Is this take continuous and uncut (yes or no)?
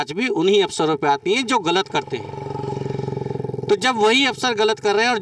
yes